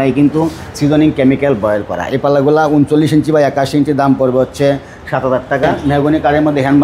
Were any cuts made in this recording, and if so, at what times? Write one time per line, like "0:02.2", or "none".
0:05.7